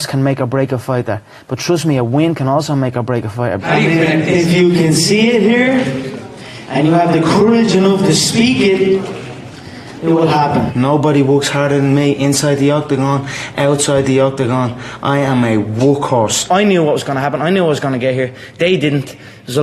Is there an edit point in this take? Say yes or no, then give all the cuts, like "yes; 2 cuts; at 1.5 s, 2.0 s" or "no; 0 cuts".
yes; 3 cuts; at 3.6 s, 10.7 s, 16.5 s